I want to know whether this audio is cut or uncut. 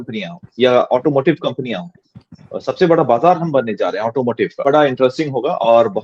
cut